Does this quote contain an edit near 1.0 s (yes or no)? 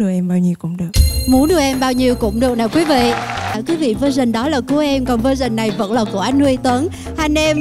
no